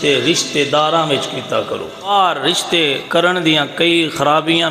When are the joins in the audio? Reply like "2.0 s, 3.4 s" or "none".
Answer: 2.1 s, 3.0 s